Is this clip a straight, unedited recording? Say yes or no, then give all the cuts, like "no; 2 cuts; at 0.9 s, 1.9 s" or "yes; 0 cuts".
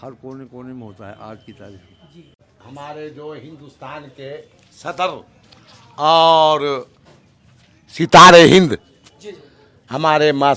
yes; 0 cuts